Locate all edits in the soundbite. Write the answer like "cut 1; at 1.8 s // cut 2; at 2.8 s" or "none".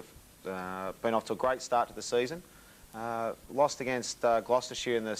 none